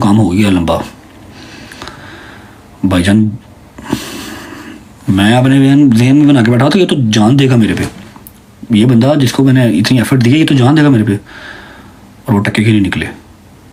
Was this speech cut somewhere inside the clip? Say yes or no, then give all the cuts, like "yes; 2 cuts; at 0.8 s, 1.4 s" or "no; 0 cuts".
no; 0 cuts